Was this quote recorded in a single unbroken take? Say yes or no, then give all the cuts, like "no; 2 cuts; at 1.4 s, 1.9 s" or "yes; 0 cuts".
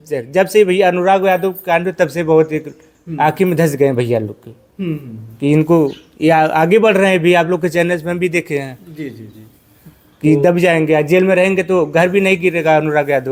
yes; 0 cuts